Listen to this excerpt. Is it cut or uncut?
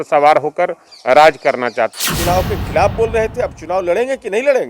cut